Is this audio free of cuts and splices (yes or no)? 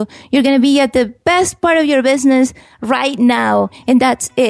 no